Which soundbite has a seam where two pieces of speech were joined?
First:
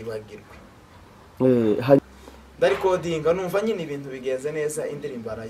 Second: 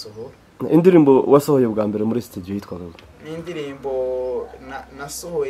first; 1 cut; at 2.0 s

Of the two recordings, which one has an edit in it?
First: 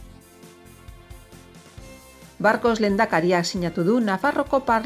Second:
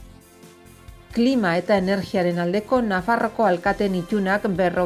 second; 1 cut; at 1.1 s

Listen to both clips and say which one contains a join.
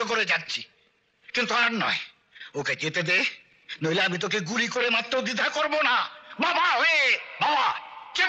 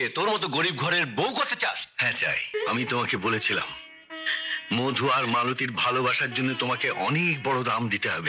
second; 1 cut; at 2.5 s

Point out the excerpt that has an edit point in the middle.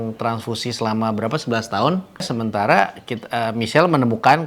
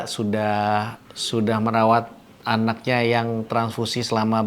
first; 1 cut; at 2.3 s

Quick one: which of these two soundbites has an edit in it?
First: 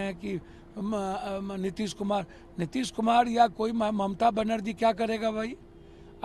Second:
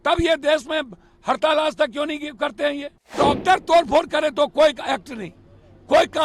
second; 1 cut; at 3.1 s

